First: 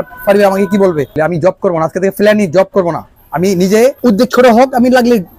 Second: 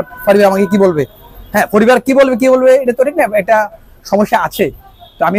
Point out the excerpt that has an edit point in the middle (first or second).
first